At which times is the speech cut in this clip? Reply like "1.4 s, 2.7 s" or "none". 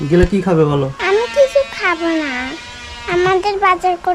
1.0 s